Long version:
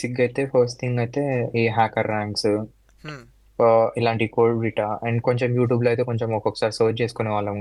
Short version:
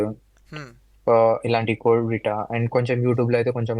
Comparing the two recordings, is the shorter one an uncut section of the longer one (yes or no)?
yes